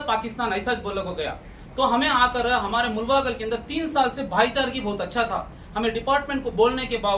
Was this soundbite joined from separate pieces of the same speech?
no; 0 cuts

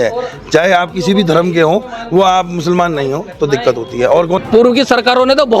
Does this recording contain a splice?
yes; 1 cut; at 4.4 s

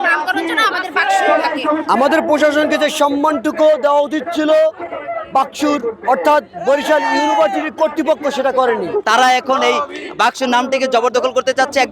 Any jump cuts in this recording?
yes; 2 cuts; at 1.8 s, 8.9 s

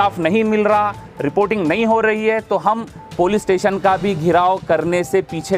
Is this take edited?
no; 0 cuts

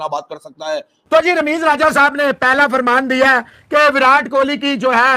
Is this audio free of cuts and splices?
no; 1 cut; at 1.1 s

